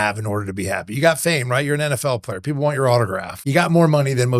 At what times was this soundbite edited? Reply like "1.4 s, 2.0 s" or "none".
3.3 s

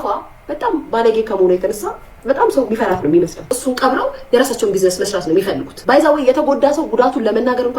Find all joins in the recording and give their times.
3.6 s, 5.7 s

